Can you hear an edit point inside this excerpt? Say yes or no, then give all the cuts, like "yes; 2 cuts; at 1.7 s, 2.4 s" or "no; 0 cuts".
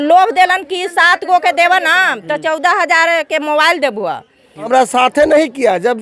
yes; 1 cut; at 4.7 s